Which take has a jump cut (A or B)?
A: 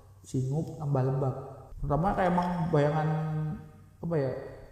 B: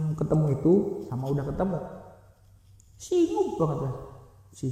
A